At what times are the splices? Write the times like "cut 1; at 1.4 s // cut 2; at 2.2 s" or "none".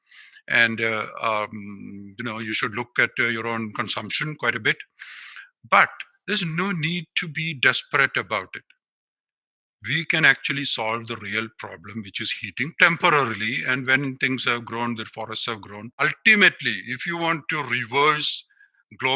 cut 1; at 16.0 s

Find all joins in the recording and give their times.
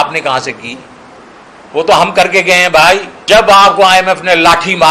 cut 1; at 3.2 s

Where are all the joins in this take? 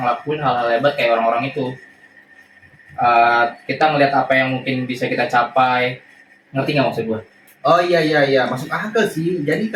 none

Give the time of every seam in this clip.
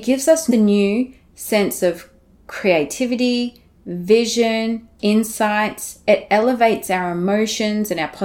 none

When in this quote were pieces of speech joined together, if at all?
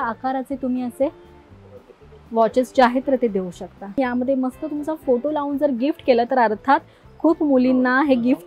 cut 1; at 4.0 s

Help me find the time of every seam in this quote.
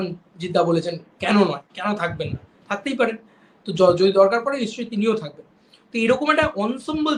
none

